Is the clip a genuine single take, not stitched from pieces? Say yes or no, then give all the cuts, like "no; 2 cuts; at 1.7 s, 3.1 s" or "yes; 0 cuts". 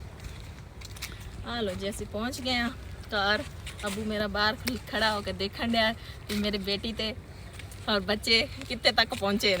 yes; 0 cuts